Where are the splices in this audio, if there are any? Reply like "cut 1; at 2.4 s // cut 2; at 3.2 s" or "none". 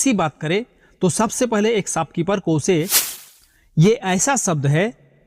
cut 1; at 3.0 s